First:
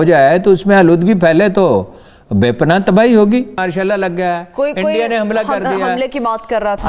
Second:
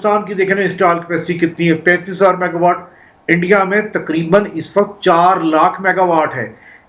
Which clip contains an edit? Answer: first; 1 cut; at 3.6 s

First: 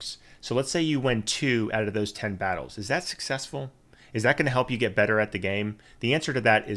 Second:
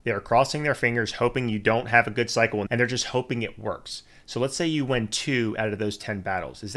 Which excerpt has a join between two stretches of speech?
second; 1 cut; at 2.7 s

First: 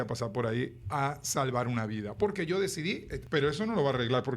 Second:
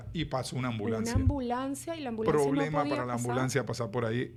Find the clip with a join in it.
first; 1 cut; at 3.1 s

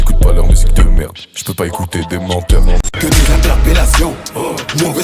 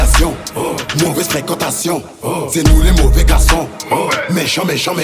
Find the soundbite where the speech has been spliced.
first; 1 cut; at 2.8 s

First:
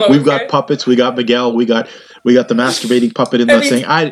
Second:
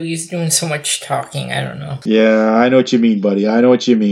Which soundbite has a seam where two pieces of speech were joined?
second; 1 cut; at 1.9 s

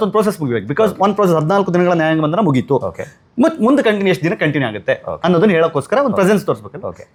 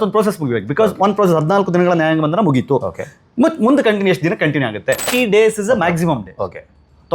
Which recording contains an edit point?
second; 1 cut; at 5.1 s

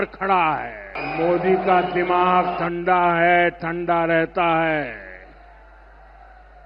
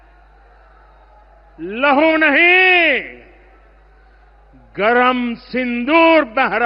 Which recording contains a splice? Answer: first; 1 cut; at 1.0 s

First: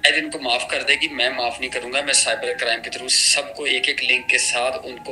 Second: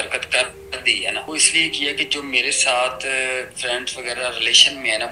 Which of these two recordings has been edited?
second; 1 cut; at 1.3 s

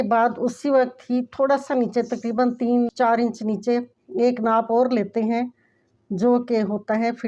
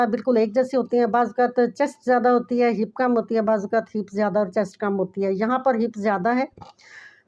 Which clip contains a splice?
first; 1 cut; at 2.9 s

